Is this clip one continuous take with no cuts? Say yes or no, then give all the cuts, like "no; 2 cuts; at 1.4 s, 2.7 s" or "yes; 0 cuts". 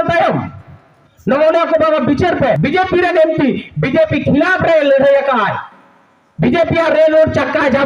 no; 1 cut; at 2.6 s